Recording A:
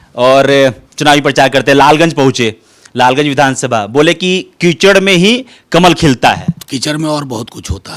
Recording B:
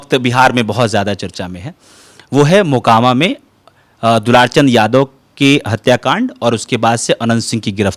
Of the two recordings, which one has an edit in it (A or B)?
A